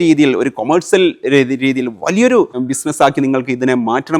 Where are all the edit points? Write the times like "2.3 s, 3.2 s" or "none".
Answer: 2.6 s

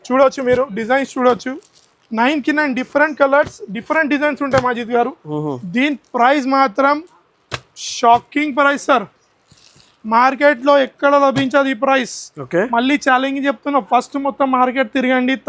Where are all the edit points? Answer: none

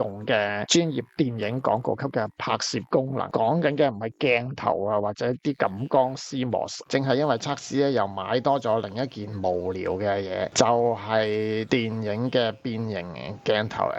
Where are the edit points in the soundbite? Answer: 6.8 s

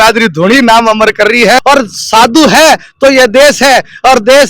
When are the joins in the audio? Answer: 1.6 s

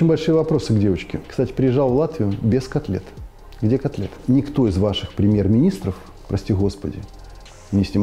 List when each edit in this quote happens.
1.1 s, 4.1 s

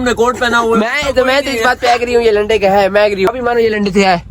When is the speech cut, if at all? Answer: 3.3 s

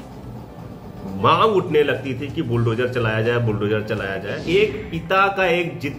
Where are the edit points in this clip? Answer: 4.3 s

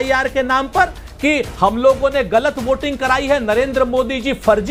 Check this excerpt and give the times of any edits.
none

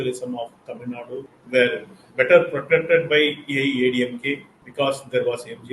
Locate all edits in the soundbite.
1.4 s, 4.6 s

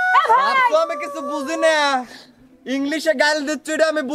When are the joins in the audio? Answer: none

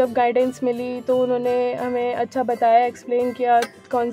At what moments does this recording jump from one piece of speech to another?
none

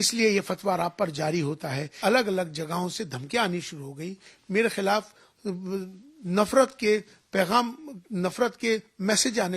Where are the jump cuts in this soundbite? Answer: 2.0 s

